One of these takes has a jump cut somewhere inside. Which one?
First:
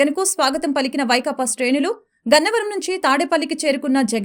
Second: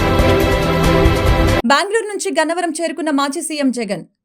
second; 1 cut; at 1.6 s

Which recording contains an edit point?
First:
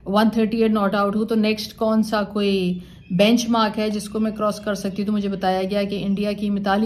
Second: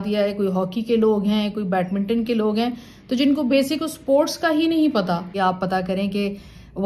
second; 1 cut; at 5.3 s

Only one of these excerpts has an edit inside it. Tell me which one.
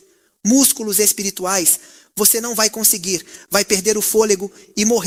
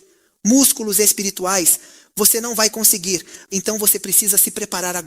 second; 1 cut; at 3.3 s

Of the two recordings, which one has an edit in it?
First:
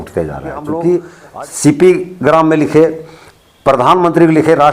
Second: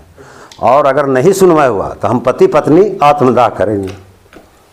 first; 1 cut; at 1.2 s

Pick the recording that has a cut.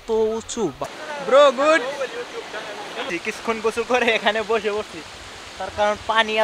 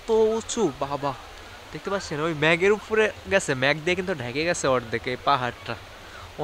first; 2 cuts; at 0.9 s, 3.1 s

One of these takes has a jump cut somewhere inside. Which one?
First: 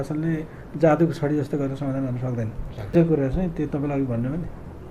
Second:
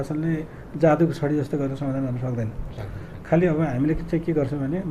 first; 1 cut; at 2.9 s

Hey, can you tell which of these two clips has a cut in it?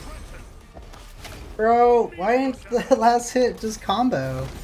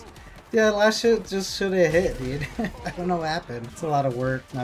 second; 1 cut; at 3.6 s

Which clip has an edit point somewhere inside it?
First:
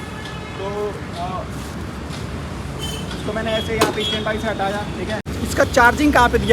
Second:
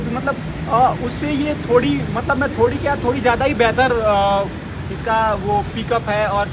first; 1 cut; at 5.3 s

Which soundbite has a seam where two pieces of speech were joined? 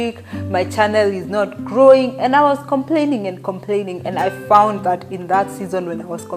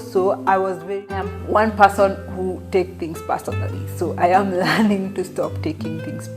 second; 1 cut; at 1.3 s

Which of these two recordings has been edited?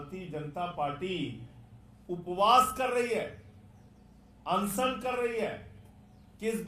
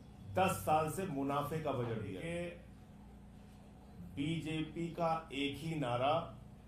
second; 1 cut; at 2.2 s

